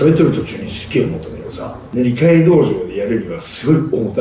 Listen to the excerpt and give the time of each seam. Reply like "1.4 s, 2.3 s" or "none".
1.8 s

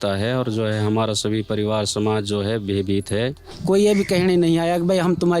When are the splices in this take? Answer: 3.5 s

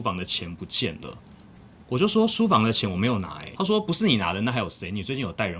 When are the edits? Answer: none

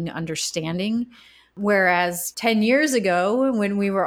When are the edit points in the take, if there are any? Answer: 1.5 s, 2.3 s

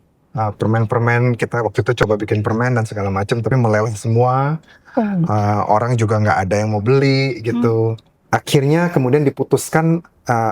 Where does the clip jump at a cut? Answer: 8.1 s

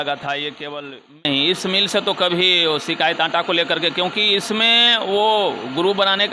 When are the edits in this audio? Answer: 1.2 s

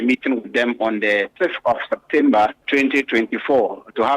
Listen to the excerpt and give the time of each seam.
1.3 s

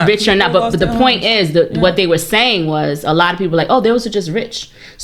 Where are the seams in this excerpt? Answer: none

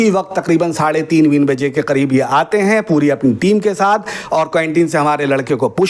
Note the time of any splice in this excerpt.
none

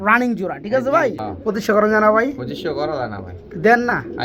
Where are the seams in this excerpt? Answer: 1.3 s

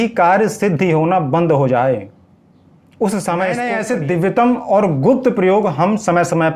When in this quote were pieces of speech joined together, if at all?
3.8 s

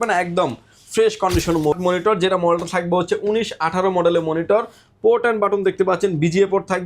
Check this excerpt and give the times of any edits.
1.7 s

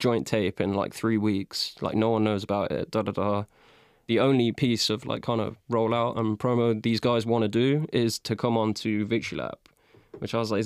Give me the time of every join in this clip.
4.0 s

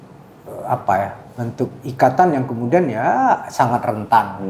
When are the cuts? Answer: none

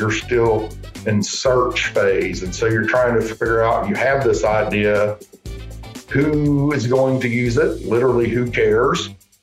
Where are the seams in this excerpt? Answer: none

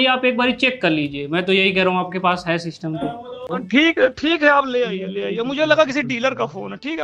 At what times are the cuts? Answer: 3.4 s

